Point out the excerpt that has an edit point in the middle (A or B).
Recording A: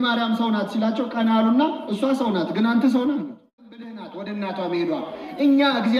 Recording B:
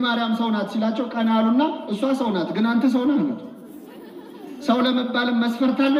A